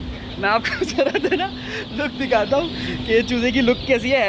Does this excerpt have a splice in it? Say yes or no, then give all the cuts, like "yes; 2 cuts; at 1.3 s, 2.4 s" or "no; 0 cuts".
no; 0 cuts